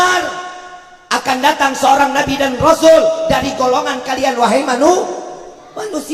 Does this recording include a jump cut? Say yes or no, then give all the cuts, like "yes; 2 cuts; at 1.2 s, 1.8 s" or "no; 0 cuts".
no; 0 cuts